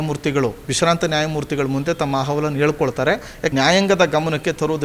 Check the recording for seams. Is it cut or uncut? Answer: cut